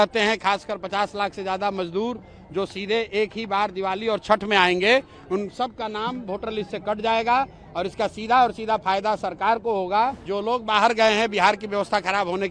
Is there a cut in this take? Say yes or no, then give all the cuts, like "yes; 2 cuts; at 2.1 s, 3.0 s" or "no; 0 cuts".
yes; 1 cut; at 10.3 s